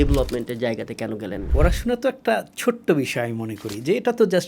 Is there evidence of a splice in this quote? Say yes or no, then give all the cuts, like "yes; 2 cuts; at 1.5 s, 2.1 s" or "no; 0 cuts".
yes; 1 cut; at 1.4 s